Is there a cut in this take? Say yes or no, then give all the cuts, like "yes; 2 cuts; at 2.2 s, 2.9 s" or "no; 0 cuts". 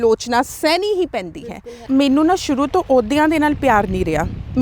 yes; 1 cut; at 1.8 s